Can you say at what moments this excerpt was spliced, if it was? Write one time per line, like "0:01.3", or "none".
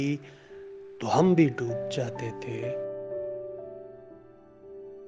0:02.5